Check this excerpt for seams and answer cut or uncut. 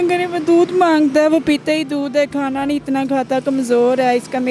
uncut